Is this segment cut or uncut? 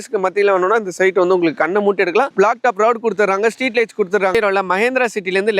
cut